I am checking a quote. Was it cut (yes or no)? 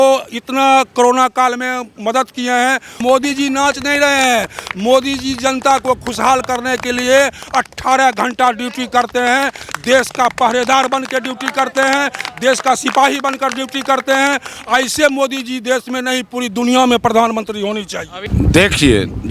yes